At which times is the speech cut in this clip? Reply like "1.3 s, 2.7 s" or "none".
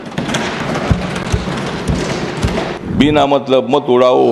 2.8 s